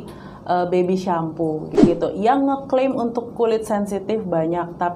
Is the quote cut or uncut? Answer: cut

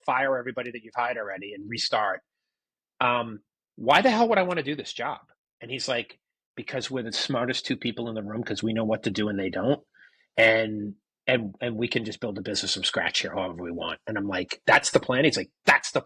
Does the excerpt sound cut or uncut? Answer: uncut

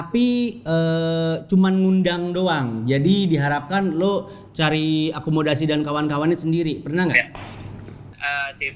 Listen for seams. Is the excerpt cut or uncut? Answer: uncut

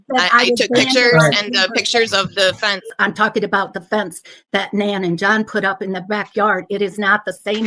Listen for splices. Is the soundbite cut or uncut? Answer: cut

